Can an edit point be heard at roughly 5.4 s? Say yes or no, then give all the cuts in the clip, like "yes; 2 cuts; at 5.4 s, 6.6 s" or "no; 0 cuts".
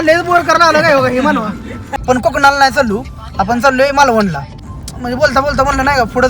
no; 1 cut; at 2.0 s